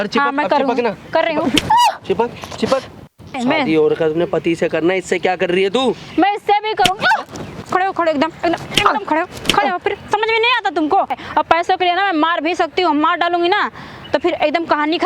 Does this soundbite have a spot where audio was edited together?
yes; 3 cuts; at 3.4 s, 7.6 s, 11.2 s

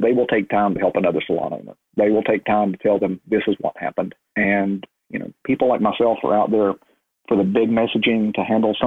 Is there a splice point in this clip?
yes; 1 cut; at 4.2 s

